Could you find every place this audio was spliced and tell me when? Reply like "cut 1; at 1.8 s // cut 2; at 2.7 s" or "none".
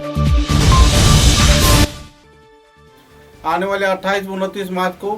cut 1; at 2.8 s